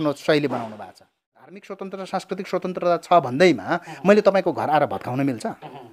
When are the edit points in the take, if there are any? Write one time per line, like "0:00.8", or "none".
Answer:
0:01.4